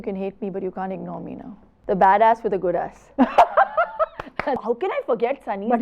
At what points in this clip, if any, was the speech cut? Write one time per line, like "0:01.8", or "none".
0:01.7
0:04.6